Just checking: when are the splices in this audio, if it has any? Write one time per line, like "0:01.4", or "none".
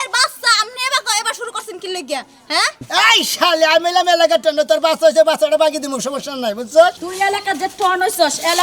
0:07.0

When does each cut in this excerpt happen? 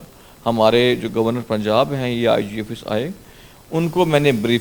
none

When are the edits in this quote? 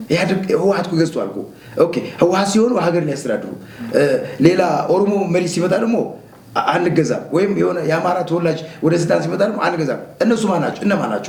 none

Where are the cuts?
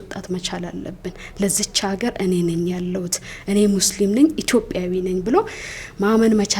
none

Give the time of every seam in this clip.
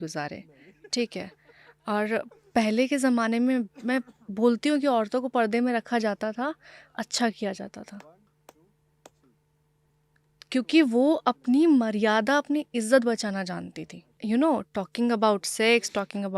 0:14.1

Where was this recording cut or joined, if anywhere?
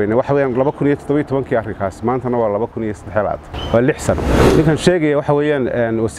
0:03.5
0:04.3

